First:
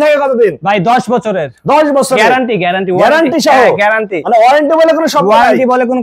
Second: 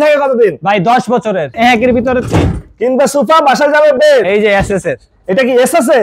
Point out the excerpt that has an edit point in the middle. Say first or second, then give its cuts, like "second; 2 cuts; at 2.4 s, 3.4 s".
second; 2 cuts; at 1.6 s, 4.3 s